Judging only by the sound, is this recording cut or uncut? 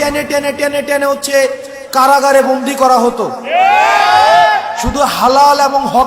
uncut